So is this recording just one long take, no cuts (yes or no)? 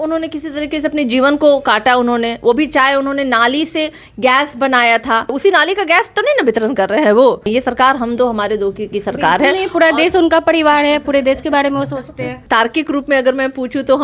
no